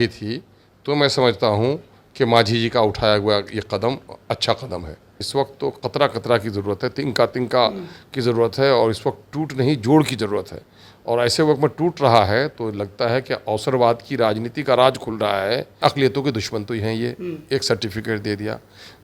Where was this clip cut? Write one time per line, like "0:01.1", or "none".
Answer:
0:05.2
0:15.8